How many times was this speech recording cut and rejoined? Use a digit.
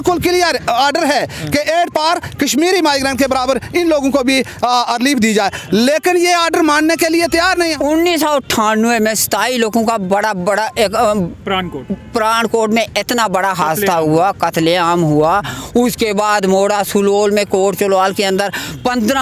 1